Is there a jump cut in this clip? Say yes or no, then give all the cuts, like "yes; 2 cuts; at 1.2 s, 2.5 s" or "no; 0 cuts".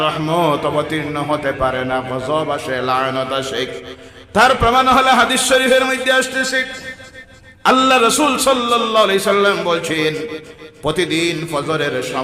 no; 0 cuts